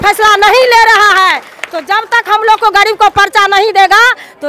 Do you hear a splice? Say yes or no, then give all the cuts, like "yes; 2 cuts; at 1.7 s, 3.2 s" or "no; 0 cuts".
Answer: no; 0 cuts